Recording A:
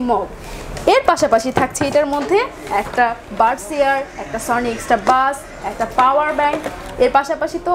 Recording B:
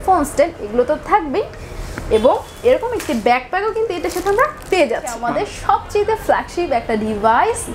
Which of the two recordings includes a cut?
B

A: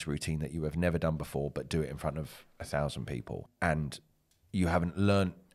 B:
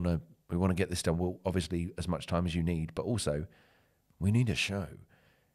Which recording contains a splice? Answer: A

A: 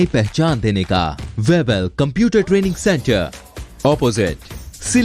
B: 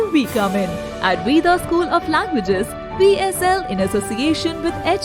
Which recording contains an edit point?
A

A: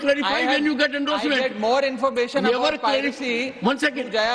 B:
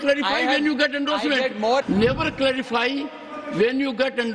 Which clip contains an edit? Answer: B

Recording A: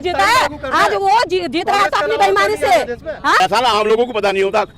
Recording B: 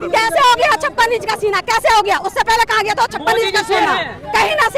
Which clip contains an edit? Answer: A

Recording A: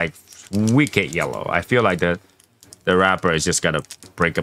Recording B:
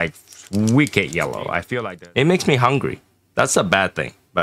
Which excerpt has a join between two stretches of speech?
B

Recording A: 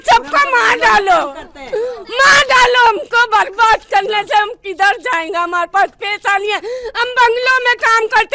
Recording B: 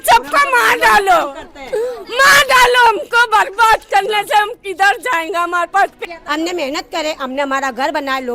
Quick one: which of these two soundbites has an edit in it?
B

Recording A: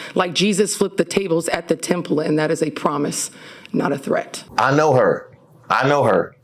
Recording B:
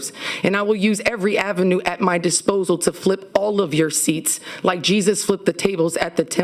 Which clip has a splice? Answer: A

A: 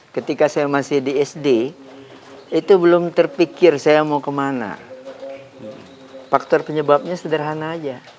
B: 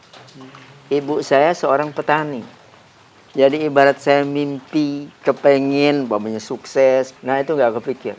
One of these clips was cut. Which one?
B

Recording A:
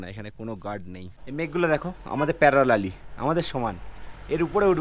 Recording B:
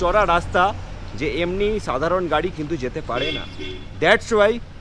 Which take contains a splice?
A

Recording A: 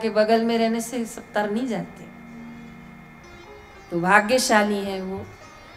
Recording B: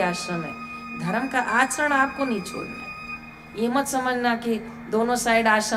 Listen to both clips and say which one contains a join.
A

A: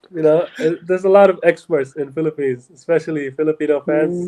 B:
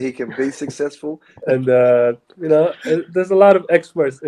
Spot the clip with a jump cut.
B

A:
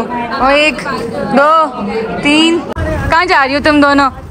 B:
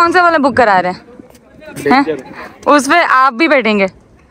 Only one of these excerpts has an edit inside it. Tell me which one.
A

